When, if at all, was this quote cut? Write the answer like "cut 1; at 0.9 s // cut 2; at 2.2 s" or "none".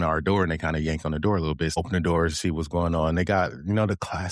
cut 1; at 1.8 s